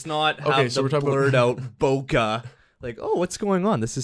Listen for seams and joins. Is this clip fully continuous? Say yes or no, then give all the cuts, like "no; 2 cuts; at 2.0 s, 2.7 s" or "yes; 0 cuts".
yes; 0 cuts